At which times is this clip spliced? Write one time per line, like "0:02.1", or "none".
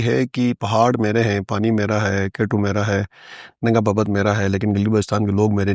none